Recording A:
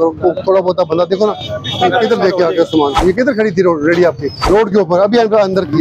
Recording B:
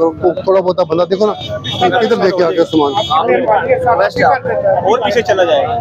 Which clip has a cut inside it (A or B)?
A